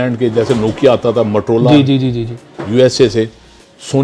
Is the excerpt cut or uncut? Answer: uncut